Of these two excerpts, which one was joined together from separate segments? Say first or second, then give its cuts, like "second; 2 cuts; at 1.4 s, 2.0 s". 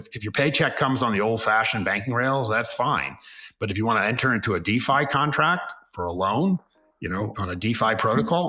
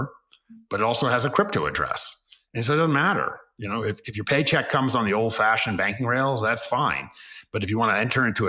first; 2 cuts; at 5.9 s, 7.3 s